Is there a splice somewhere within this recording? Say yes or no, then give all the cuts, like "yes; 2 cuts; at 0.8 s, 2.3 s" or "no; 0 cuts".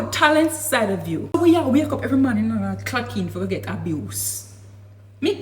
yes; 1 cut; at 1.3 s